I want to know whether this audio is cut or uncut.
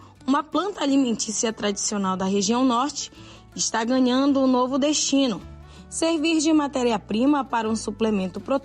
uncut